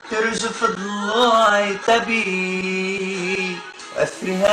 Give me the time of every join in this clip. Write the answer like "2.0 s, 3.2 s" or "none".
none